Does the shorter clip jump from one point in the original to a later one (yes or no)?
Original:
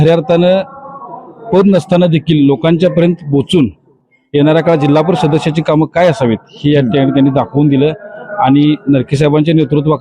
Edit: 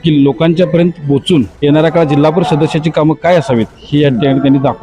yes